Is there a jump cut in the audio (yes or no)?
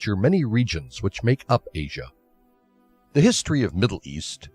no